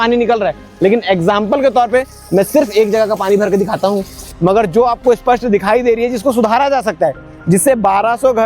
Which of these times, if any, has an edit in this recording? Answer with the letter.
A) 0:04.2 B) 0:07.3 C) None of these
A